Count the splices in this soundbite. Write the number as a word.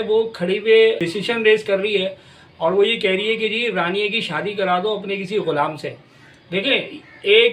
one